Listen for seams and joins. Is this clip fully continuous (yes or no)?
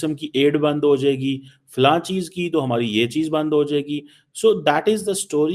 yes